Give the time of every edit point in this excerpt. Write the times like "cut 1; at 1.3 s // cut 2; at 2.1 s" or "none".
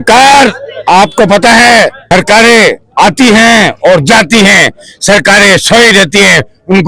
none

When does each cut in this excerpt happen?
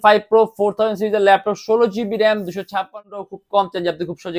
cut 1; at 3.1 s

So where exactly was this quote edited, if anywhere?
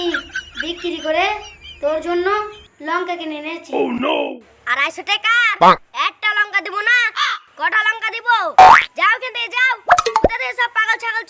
cut 1; at 4.2 s

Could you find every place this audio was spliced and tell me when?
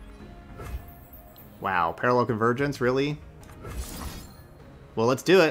cut 1; at 3.4 s

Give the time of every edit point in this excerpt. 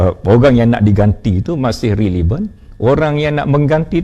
none

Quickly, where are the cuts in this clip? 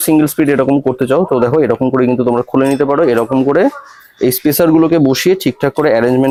none

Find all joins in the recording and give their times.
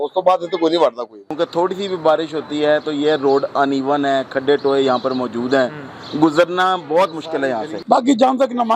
cut 1; at 1.3 s // cut 2; at 7.7 s

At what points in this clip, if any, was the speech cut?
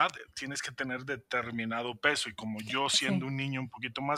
none

